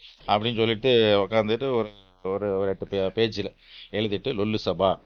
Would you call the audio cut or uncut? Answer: uncut